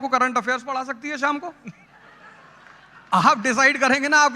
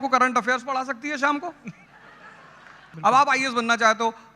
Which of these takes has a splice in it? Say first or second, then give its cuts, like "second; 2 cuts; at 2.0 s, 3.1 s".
second; 1 cut; at 2.8 s